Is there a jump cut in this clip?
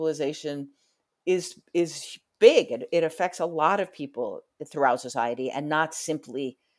no; 0 cuts

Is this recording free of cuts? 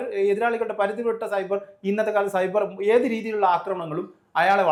yes; 0 cuts

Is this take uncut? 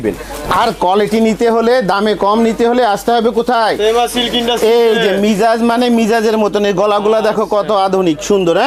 yes; 0 cuts

